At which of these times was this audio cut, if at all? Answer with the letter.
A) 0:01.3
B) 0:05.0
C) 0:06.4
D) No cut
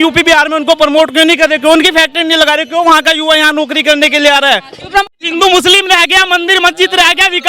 B